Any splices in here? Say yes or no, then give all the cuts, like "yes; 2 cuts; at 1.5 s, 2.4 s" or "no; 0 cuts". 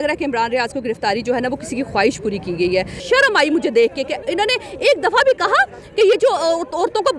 yes; 1 cut; at 3.0 s